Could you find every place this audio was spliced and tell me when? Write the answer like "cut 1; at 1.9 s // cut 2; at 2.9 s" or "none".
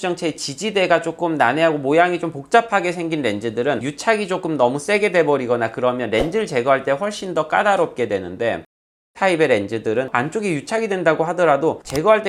none